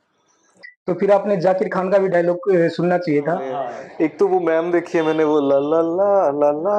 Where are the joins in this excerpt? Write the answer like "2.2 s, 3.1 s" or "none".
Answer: 3.6 s